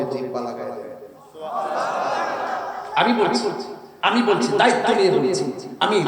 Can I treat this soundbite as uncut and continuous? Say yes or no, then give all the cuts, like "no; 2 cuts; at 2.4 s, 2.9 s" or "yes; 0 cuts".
yes; 0 cuts